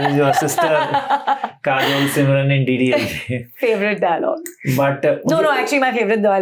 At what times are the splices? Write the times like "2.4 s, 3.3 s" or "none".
none